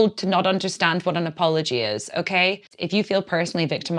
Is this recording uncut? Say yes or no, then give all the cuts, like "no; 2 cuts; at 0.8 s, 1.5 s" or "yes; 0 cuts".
no; 1 cut; at 2.7 s